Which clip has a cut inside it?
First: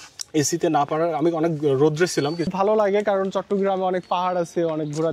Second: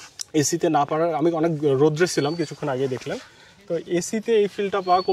first; 1 cut; at 2.5 s

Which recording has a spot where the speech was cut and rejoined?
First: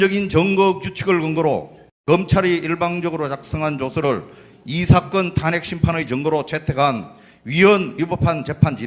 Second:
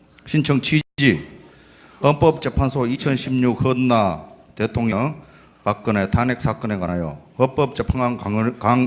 first; 1 cut; at 4.2 s

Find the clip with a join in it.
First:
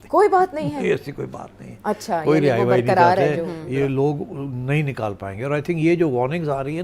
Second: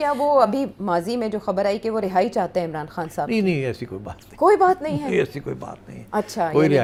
first; 1 cut; at 3.5 s

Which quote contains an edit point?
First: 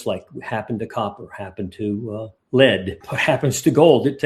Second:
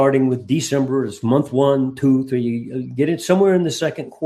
first; 1 cut; at 2.9 s

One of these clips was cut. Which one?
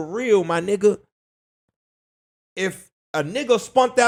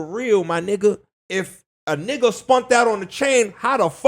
second; 1 cut; at 1.1 s

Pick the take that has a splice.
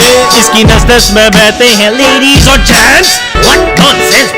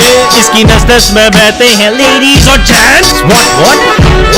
first; 1 cut; at 3.2 s

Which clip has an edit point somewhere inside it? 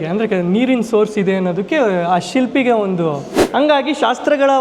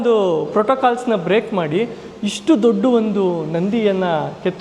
first; 1 cut; at 3.4 s

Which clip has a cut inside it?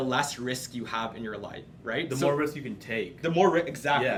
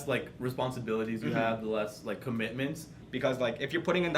second; 1 cut; at 3.0 s

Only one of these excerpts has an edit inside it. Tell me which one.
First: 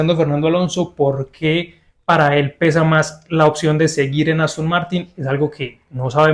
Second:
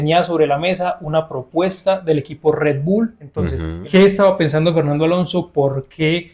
second; 1 cut; at 3.6 s

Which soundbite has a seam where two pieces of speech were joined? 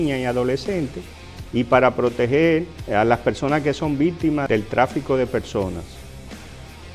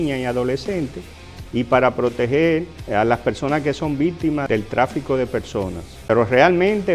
second; 1 cut; at 5.9 s

